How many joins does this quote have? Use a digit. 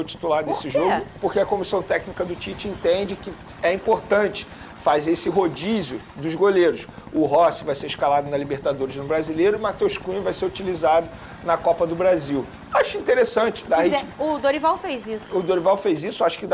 0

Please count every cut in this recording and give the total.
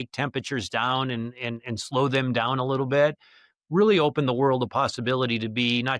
0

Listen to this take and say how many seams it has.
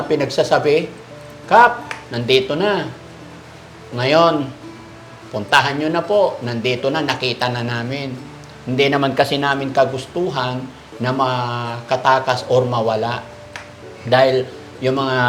0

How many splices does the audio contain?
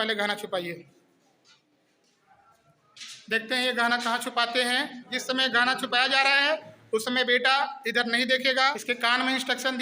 2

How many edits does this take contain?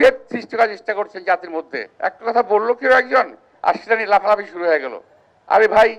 1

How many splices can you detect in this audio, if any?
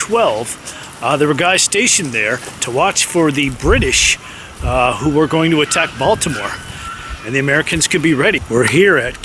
2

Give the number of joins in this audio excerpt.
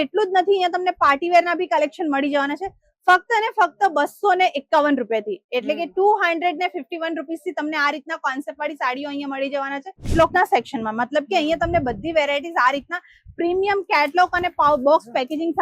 1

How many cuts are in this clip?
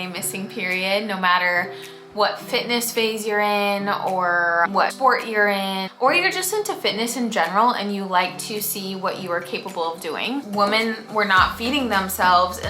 3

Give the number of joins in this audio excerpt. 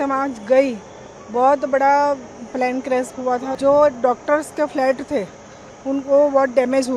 1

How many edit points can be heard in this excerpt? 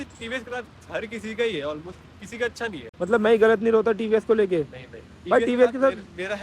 0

